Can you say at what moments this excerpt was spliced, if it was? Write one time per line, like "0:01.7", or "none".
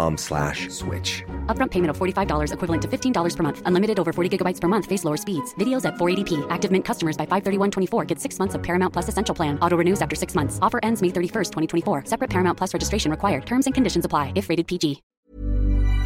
0:15.1